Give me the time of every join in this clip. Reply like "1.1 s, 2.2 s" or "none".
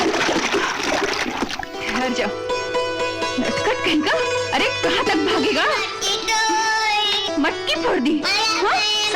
1.8 s